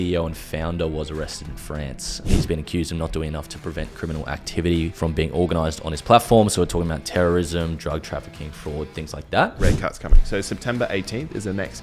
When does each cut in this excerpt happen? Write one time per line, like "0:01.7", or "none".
0:02.2
0:04.9
0:09.6